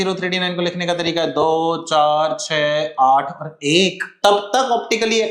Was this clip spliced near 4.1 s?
yes; 1 cut; at 4.1 s

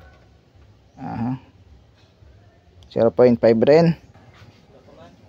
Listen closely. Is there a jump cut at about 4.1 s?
yes; 1 cut; at 4.1 s

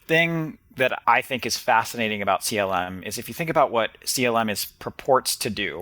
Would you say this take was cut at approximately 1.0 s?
yes; 1 cut; at 1.0 s

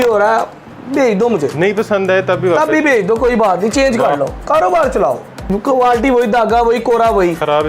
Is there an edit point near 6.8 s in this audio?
no; 1 cut; at 5.5 s

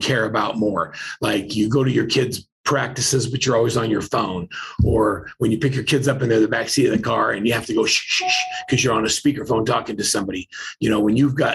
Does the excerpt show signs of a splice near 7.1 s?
no; 0 cuts

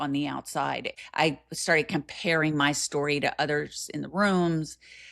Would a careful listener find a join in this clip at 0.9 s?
yes; 1 cut; at 0.9 s

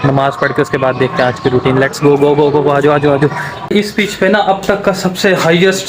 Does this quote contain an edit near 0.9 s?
no; 1 cut; at 3.7 s

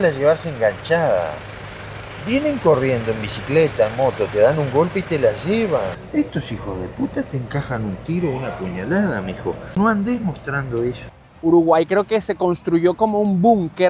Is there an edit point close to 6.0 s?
yes; 3 cuts; at 6.0 s, 9.7 s, 11.0 s

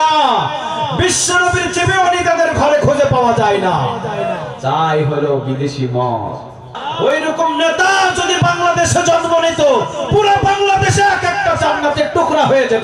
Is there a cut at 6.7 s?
yes; 1 cut; at 6.7 s

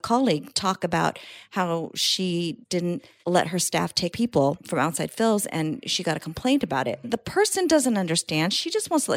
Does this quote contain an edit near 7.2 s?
yes; 3 cuts; at 2.9 s, 4.1 s, 7.2 s

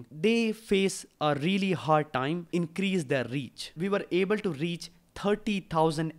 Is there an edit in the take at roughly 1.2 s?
no; 2 cuts; at 2.4 s, 3.8 s

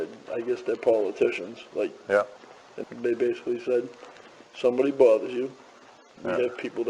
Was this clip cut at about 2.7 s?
yes; 1 cut; at 2.7 s

